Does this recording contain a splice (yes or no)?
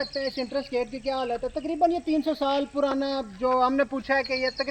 no